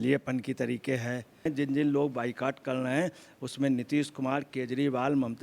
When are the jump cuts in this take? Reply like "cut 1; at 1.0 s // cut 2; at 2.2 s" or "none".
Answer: cut 1; at 1.5 s